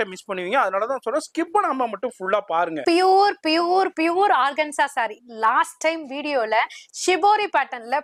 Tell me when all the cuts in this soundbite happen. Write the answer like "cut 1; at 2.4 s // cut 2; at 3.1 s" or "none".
none